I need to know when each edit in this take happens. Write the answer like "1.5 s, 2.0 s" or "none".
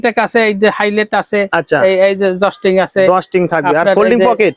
none